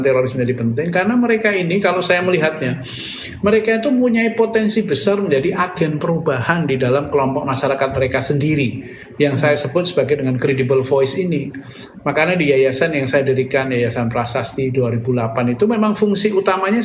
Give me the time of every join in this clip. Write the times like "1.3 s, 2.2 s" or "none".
none